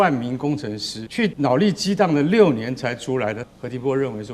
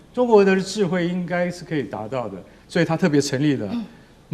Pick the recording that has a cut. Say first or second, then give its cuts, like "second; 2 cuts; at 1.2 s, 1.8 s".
first; 2 cuts; at 1.2 s, 3.4 s